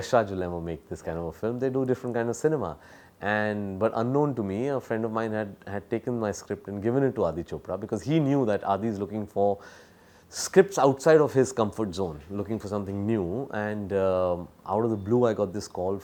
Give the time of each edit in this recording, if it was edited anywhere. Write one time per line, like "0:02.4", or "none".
none